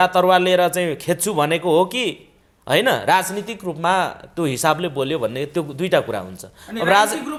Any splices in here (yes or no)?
no